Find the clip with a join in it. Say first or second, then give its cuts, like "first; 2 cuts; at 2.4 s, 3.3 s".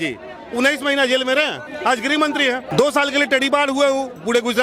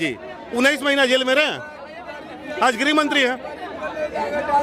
first; 2 cuts; at 1.6 s, 2.7 s